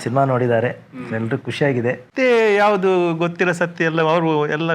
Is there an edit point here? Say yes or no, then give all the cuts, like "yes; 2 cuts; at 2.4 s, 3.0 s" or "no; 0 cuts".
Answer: yes; 1 cut; at 2.1 s